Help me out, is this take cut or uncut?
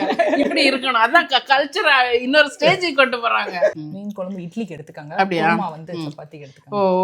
cut